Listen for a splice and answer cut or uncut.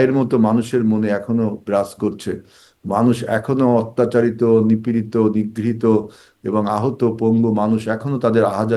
uncut